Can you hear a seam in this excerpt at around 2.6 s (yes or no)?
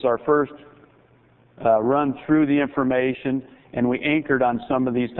no